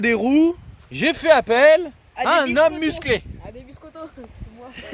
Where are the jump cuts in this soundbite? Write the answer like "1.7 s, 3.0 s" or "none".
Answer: none